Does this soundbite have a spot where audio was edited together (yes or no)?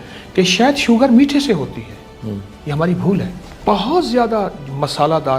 yes